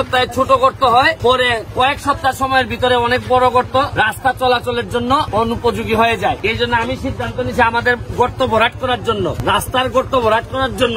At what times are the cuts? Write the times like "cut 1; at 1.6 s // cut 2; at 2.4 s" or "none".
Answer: cut 1; at 1.2 s // cut 2; at 3.9 s // cut 3; at 5.3 s // cut 4; at 6.4 s // cut 5; at 9.4 s